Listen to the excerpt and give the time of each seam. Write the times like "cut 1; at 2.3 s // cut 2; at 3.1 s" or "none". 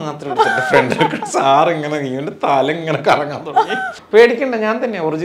cut 1; at 3.9 s

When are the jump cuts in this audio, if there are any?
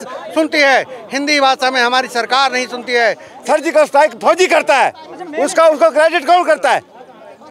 cut 1; at 3.3 s

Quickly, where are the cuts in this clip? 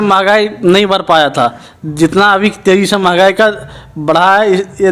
none

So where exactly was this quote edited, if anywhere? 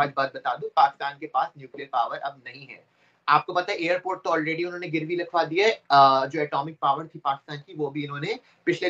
none

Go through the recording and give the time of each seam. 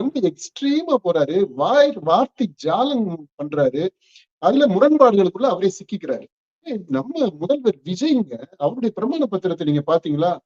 cut 1; at 6.7 s

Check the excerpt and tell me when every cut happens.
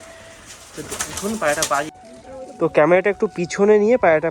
cut 1; at 1.9 s

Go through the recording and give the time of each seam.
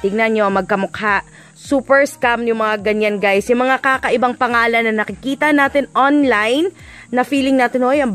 cut 1; at 1.4 s

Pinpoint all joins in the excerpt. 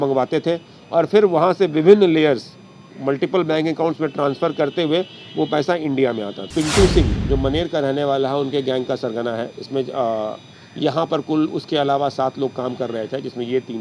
cut 1; at 6.3 s

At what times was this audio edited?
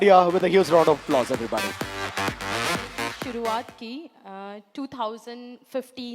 cut 1; at 3.2 s

